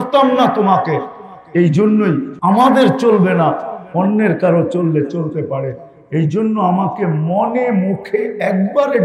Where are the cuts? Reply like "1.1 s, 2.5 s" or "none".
2.3 s